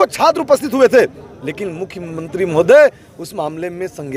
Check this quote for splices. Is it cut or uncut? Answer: uncut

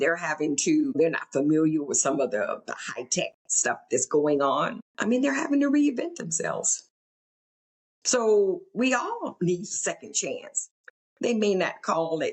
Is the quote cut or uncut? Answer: cut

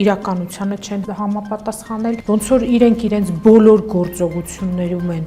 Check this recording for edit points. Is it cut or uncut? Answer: cut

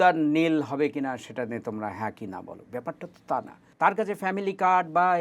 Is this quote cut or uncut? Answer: cut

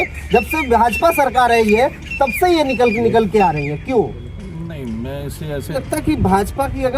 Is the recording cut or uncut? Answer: cut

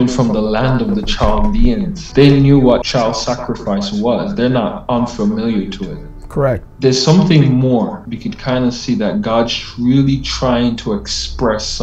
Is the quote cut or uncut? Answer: cut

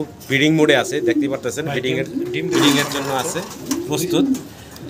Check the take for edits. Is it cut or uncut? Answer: uncut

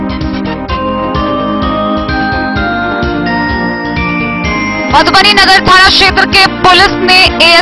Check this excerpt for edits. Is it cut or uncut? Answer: uncut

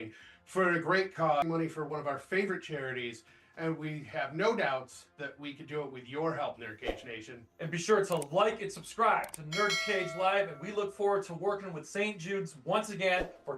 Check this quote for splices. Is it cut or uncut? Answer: cut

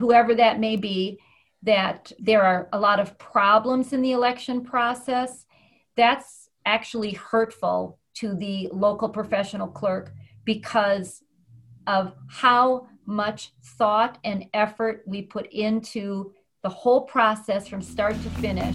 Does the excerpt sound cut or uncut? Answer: uncut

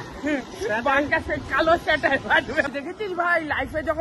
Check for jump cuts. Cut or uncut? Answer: cut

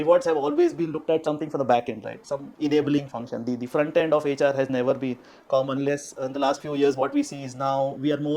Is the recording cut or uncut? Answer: uncut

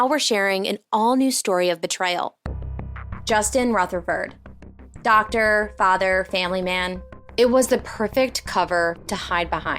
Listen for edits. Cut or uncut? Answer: cut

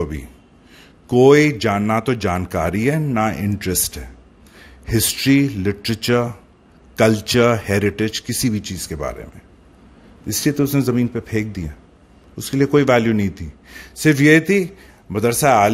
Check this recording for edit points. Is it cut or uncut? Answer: uncut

